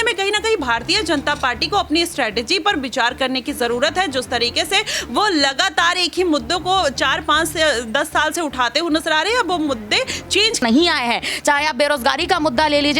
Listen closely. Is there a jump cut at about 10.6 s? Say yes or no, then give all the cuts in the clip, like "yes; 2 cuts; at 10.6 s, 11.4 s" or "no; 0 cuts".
yes; 1 cut; at 10.6 s